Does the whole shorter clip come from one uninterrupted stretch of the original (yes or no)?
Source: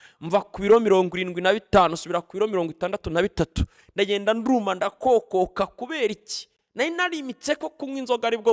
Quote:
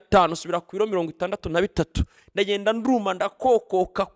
yes